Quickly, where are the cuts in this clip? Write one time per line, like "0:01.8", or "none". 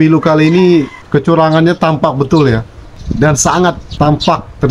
0:01.0
0:03.0
0:03.9